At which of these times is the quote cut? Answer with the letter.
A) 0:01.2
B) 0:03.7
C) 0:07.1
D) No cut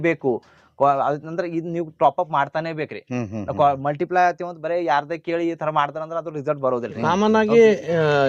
C